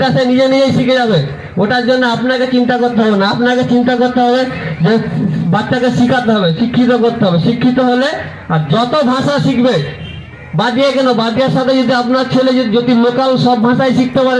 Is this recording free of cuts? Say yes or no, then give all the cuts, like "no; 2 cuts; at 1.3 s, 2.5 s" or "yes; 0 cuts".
yes; 0 cuts